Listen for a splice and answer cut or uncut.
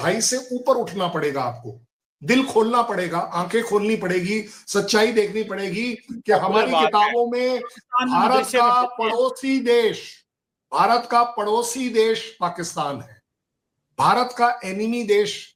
uncut